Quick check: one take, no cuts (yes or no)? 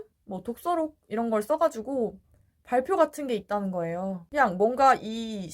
no